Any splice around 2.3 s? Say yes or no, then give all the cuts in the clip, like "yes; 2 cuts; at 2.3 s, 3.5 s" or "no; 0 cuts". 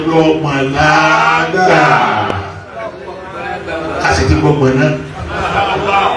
no; 0 cuts